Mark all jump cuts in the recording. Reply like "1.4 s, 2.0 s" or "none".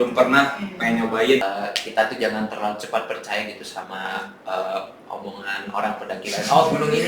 1.4 s

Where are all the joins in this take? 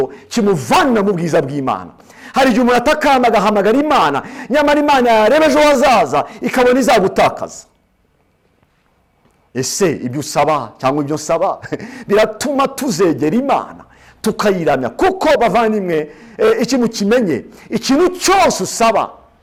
none

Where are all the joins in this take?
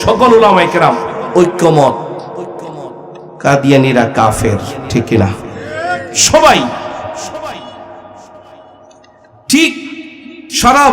none

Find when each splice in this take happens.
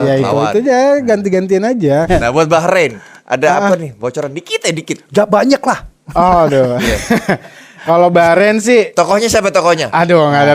2.1 s

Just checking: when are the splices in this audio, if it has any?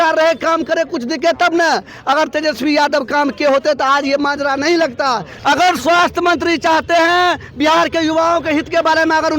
5.3 s

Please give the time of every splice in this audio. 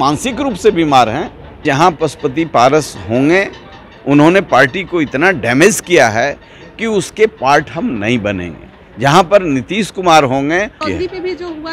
1.6 s, 10.8 s

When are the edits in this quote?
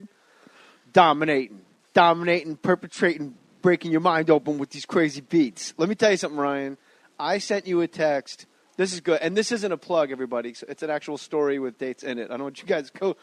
none

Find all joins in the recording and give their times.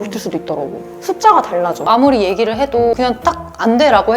1.9 s

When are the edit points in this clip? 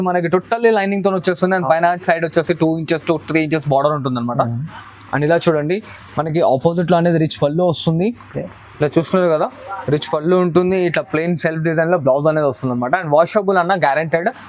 none

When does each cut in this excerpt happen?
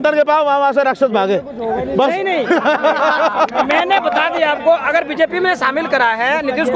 none

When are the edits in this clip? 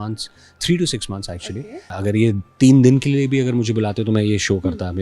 1.9 s

